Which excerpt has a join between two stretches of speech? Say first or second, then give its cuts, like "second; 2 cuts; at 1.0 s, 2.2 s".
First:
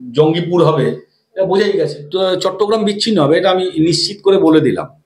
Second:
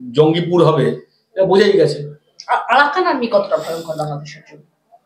first; 1 cut; at 2.0 s